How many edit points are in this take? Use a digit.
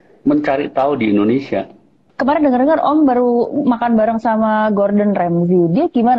1